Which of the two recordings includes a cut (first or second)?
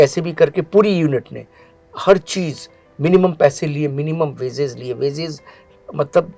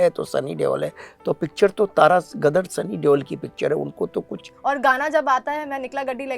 second